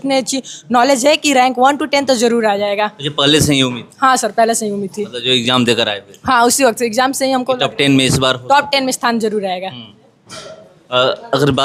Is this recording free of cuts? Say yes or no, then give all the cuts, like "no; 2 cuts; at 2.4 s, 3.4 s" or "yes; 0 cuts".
yes; 0 cuts